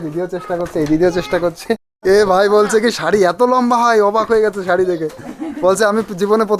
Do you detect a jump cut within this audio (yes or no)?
yes